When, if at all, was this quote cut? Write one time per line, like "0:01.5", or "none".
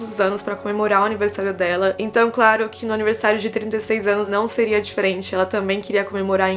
none